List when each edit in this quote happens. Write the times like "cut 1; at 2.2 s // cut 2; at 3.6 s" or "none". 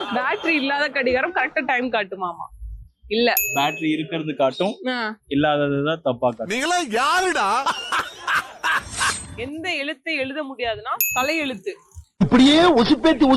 cut 1; at 9.2 s

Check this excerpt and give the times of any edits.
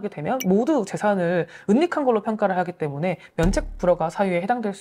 none

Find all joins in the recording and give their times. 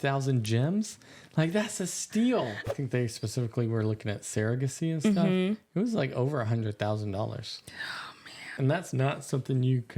cut 1; at 2.6 s // cut 2; at 8.5 s

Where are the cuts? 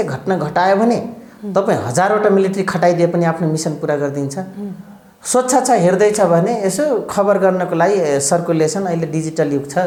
none

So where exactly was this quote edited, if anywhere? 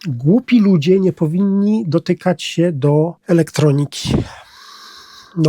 cut 1; at 3.2 s

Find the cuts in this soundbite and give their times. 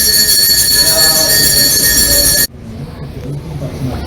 cut 1; at 2.5 s

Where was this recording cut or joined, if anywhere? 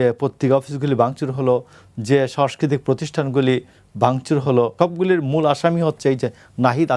cut 1; at 4.7 s

